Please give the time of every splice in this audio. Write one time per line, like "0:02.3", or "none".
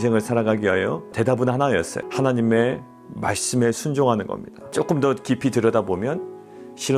0:01.1
0:02.0
0:04.7